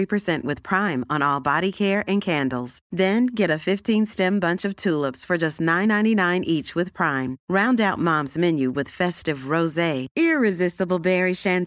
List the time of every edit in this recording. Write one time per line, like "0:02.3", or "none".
none